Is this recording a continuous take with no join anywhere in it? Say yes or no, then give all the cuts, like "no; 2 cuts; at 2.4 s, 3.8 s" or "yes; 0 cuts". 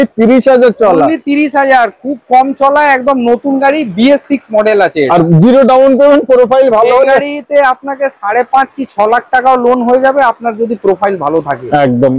yes; 0 cuts